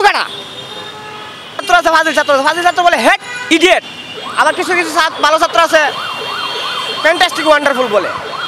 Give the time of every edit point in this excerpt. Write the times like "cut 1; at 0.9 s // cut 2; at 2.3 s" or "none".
cut 1; at 1.6 s // cut 2; at 3.3 s